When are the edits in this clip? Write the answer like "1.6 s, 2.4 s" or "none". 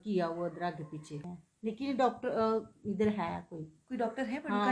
1.2 s